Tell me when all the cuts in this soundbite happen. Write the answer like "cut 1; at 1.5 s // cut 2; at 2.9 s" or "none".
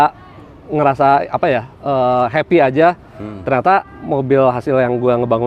none